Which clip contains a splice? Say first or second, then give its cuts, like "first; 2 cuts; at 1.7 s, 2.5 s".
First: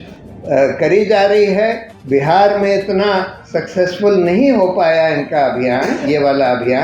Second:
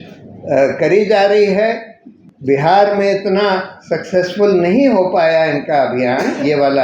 first; 1 cut; at 1.9 s